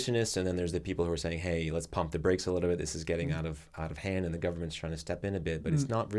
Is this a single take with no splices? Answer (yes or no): yes